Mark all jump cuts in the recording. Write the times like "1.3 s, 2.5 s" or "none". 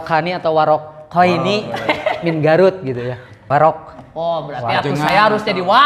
3.4 s

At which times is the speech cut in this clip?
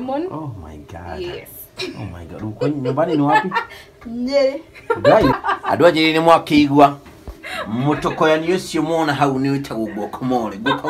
5.3 s

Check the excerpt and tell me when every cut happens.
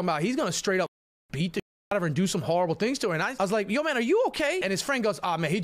3.3 s, 4.6 s

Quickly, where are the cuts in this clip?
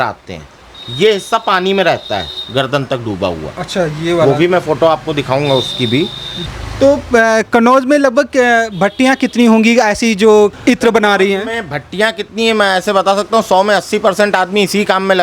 6.3 s

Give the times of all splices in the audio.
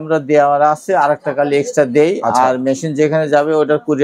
none

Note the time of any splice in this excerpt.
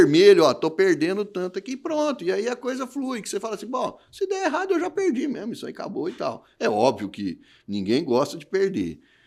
none

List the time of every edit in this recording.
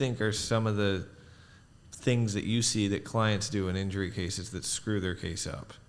none

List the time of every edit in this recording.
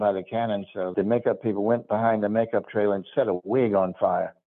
none

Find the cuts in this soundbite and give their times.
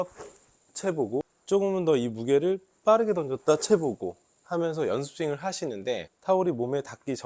1.3 s, 6.1 s

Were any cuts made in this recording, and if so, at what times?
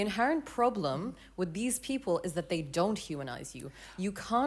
2.7 s

